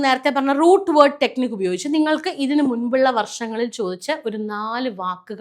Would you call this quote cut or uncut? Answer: uncut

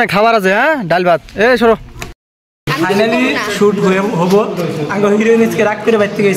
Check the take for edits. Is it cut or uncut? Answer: cut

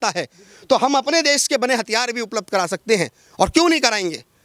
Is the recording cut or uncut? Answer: uncut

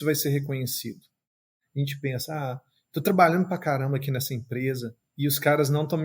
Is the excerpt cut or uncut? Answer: cut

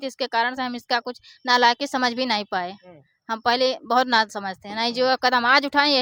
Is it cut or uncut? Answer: uncut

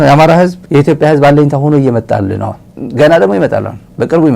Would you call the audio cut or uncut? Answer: cut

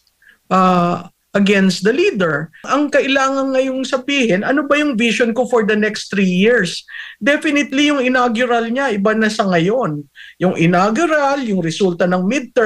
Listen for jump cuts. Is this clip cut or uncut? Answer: cut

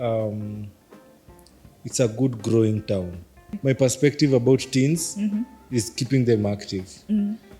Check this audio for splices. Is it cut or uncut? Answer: cut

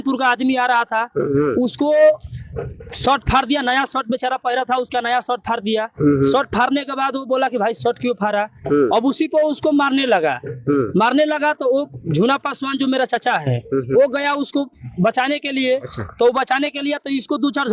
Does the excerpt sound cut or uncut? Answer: uncut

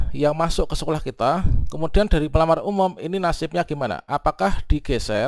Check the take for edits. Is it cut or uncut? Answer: uncut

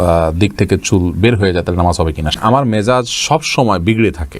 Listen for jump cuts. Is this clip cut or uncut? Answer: cut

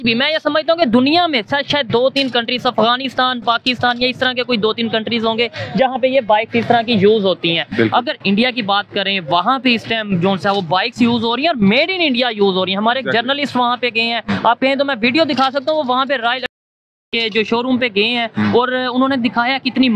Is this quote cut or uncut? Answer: uncut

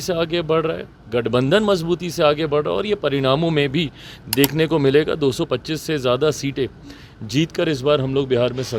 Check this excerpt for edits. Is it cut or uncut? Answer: uncut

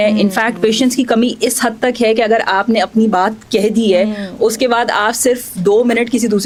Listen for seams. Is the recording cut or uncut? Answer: uncut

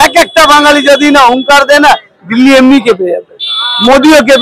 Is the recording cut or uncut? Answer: uncut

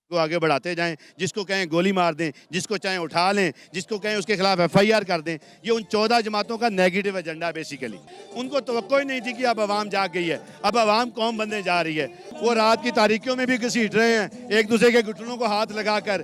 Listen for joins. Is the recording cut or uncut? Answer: cut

